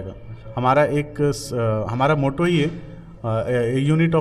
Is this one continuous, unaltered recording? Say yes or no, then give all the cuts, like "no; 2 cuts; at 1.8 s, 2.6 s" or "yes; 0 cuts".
yes; 0 cuts